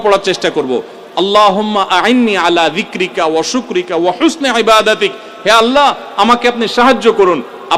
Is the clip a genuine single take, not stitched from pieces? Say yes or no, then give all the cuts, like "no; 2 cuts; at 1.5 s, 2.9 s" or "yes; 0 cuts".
yes; 0 cuts